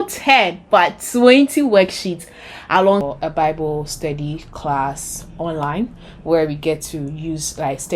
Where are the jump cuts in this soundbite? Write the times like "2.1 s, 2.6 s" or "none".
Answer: 3.1 s